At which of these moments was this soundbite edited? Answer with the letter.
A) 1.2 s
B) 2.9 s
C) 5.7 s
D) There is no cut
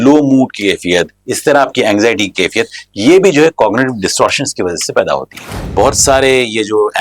C